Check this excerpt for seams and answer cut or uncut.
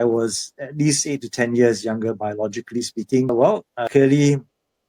cut